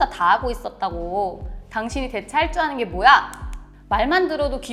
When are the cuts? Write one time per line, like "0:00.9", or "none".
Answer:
none